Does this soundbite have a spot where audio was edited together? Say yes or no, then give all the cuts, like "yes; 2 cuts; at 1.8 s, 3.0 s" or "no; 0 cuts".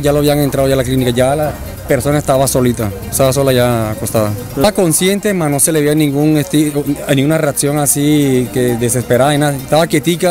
no; 0 cuts